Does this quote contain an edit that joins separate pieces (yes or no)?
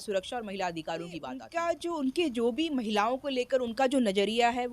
yes